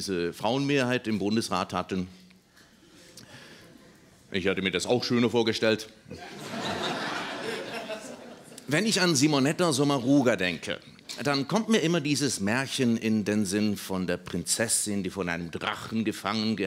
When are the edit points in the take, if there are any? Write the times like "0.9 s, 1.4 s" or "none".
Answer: 5.0 s